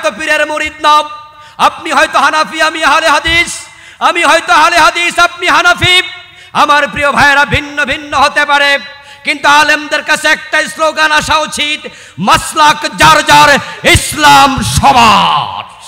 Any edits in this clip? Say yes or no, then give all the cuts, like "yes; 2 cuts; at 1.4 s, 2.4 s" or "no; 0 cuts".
no; 0 cuts